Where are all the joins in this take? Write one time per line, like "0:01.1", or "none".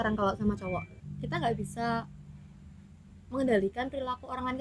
0:01.0